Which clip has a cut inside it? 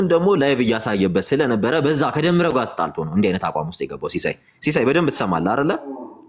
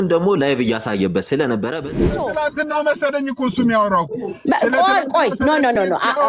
second; 1 cut; at 1.8 s

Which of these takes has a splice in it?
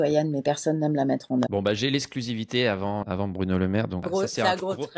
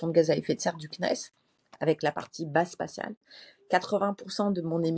first; 3 cuts; at 1.5 s, 3.0 s, 4.1 s

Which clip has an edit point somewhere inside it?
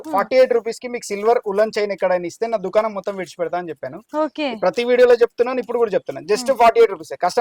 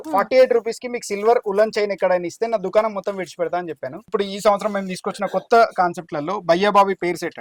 second; 1 cut; at 4.0 s

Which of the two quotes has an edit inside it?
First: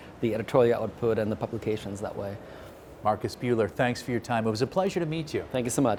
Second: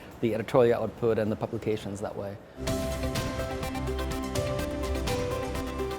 second; 1 cut; at 2.6 s

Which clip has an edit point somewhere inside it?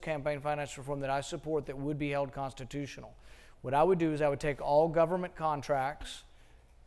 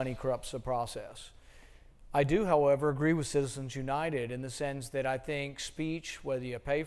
first; 1 cut; at 3.9 s

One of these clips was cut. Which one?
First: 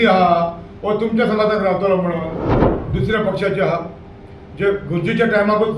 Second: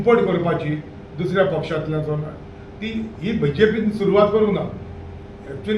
first; 1 cut; at 2.6 s

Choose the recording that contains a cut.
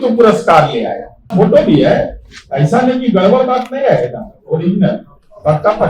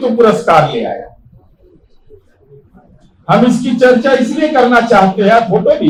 first; 1 cut; at 1.3 s

